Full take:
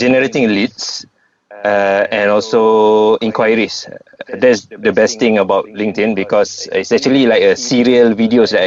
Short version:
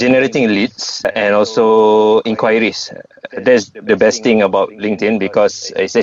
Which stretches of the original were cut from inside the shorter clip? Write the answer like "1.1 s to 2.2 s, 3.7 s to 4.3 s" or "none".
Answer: 1.1 s to 2.1 s